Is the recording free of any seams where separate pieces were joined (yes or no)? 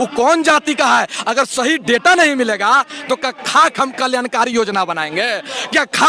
yes